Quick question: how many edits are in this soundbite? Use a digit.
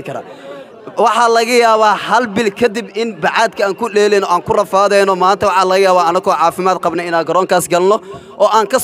0